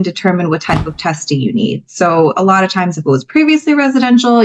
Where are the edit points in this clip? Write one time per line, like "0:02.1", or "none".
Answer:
none

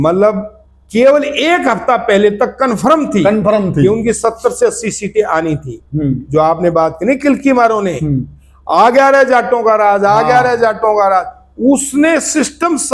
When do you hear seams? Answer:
none

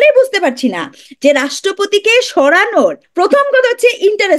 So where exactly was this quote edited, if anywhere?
0:03.0

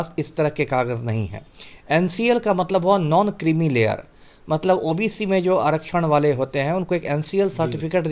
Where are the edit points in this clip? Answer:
none

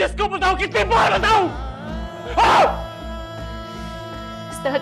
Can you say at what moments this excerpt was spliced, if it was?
none

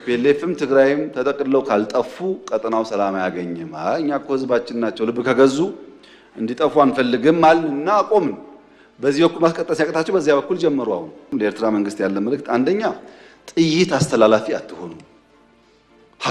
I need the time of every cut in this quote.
0:11.3

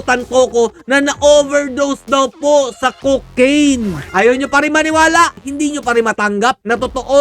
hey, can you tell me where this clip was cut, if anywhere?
0:04.0
0:05.4

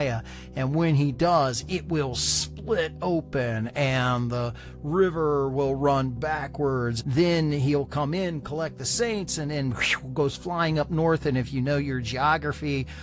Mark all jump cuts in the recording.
0:07.0

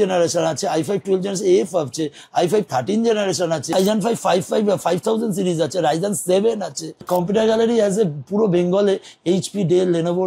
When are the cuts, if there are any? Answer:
0:03.7
0:07.0

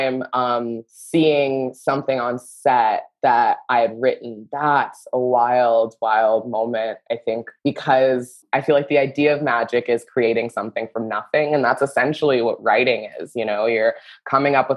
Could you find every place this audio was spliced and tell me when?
0:00.9
0:07.5
0:08.4

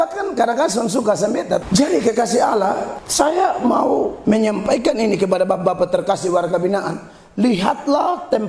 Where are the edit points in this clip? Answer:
0:01.6
0:03.0
0:04.2

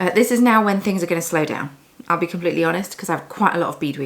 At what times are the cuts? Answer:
none

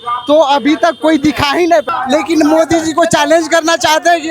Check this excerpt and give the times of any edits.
0:01.9

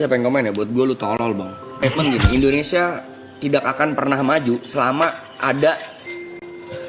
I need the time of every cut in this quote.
0:01.7

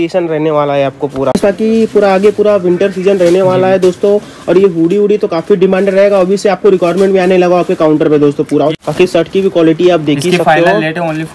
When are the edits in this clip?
0:01.4
0:08.7

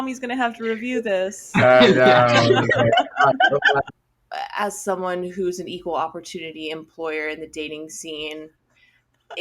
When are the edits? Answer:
0:03.9

